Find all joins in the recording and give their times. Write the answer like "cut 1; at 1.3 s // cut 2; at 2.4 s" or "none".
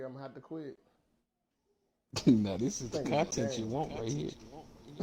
cut 1; at 2.4 s